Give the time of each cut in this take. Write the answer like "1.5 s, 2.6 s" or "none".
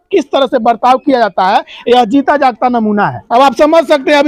none